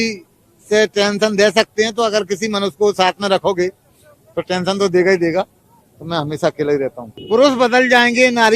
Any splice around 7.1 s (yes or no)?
yes